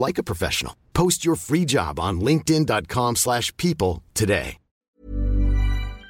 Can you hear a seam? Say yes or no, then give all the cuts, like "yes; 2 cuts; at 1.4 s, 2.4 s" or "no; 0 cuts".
yes; 1 cut; at 5.0 s